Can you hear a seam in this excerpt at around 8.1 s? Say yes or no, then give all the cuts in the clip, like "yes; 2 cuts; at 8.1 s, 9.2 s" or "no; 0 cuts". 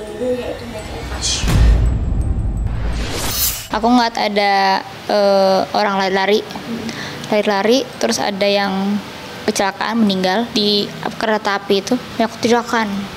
no; 4 cuts; at 1.4 s, 3.6 s, 10.5 s, 12.1 s